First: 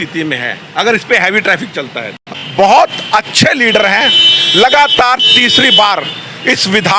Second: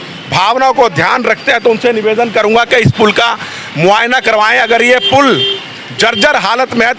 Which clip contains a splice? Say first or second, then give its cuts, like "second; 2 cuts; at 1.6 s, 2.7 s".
first; 1 cut; at 2.1 s